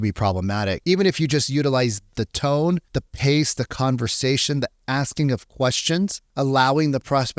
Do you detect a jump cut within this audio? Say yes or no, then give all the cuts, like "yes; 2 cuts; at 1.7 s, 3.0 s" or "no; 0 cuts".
yes; 4 cuts; at 0.8 s, 2.1 s, 3.0 s, 6.2 s